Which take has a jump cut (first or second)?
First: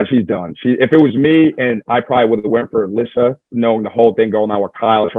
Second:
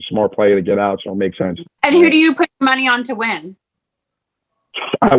second